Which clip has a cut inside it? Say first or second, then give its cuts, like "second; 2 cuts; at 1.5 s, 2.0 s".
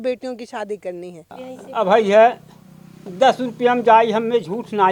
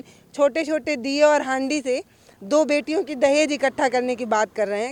first; 1 cut; at 1.5 s